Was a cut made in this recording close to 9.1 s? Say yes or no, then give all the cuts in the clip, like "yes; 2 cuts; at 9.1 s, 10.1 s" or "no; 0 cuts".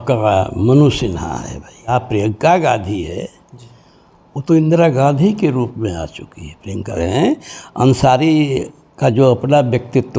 no; 2 cuts; at 1.9 s, 6.9 s